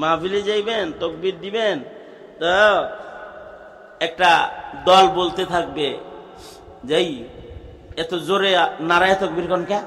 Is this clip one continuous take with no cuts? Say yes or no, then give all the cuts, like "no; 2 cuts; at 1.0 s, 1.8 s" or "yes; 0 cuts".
yes; 0 cuts